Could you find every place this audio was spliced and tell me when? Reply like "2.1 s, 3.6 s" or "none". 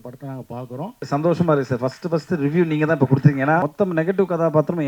1.0 s, 3.7 s